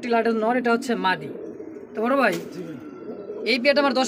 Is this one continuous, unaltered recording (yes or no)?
yes